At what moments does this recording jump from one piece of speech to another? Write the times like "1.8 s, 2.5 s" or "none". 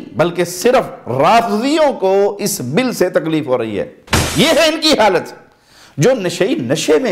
4.2 s